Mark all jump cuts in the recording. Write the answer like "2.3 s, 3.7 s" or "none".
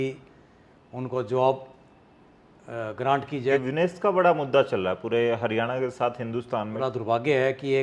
3.6 s, 6.7 s